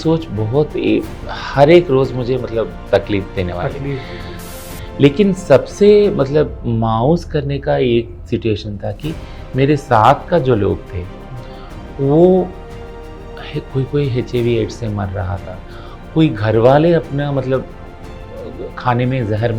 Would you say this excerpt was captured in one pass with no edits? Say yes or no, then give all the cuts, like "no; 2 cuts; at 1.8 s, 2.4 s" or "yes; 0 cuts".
no; 1 cut; at 4.4 s